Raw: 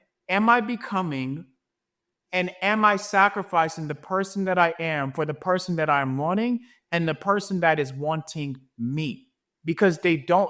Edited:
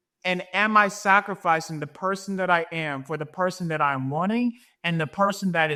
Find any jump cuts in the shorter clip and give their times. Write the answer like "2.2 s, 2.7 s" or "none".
none